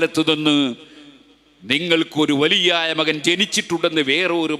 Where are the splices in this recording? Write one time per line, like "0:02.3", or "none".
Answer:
none